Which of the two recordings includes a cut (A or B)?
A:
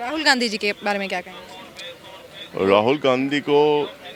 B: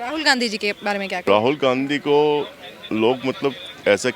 B